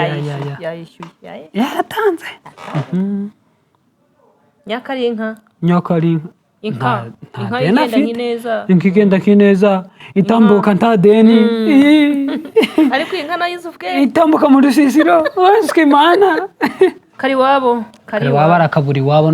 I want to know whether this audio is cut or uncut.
cut